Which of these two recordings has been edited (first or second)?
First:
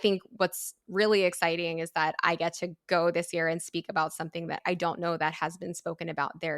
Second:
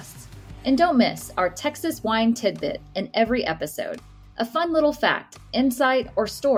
first